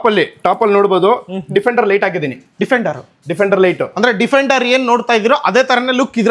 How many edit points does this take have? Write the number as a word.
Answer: zero